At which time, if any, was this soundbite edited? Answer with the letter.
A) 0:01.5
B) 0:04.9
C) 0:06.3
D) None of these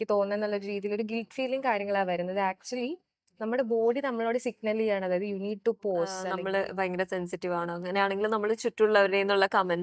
C